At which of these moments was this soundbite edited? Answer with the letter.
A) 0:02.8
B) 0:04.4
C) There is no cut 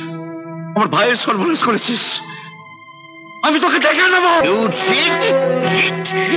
B